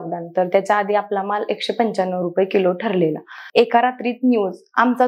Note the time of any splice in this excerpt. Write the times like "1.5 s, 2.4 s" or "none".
3.4 s

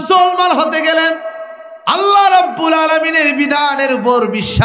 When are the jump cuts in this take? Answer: none

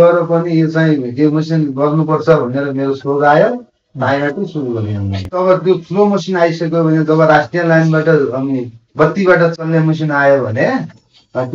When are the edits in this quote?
5.4 s

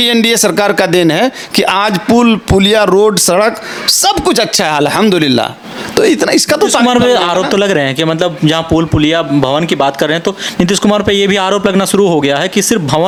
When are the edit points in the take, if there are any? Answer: none

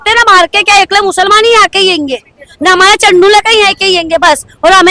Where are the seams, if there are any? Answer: none

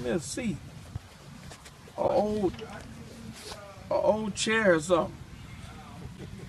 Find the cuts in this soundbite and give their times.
none

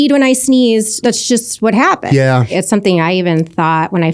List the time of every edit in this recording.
0.9 s, 2.5 s

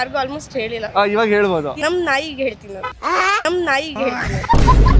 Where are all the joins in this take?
none

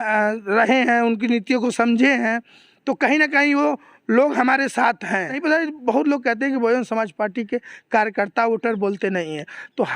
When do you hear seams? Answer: 5.4 s

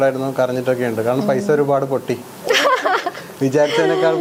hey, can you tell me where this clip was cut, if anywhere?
none

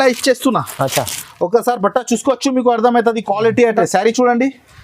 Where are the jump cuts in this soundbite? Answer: 3.8 s

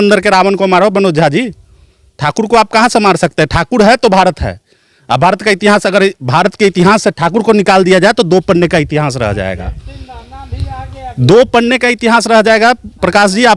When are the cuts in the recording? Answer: none

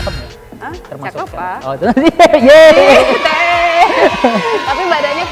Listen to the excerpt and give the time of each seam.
none

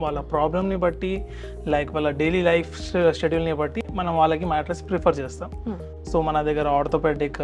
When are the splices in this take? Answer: none

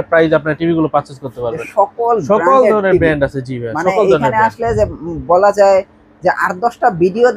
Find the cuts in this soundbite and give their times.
1.5 s

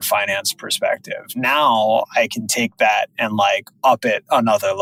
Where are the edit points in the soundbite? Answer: none

